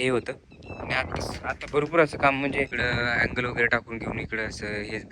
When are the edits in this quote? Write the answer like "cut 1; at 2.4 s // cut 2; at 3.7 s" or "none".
cut 1; at 2.8 s